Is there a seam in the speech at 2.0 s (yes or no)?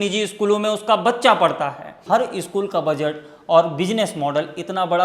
yes